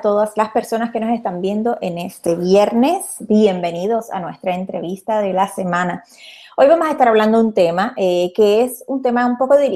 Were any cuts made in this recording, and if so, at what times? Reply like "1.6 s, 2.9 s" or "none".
none